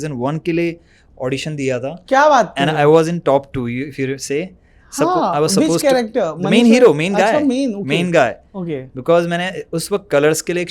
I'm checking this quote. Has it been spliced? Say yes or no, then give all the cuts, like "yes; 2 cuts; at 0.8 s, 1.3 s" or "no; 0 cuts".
no; 0 cuts